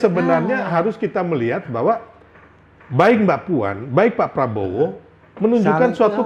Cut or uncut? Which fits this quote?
uncut